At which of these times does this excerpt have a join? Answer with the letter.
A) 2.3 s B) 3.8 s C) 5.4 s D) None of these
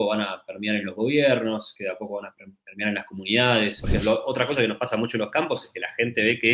B